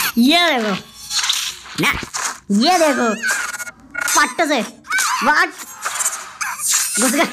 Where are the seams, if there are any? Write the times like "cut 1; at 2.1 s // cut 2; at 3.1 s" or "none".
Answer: none

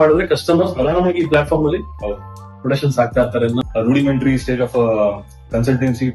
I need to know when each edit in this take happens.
cut 1; at 3.6 s

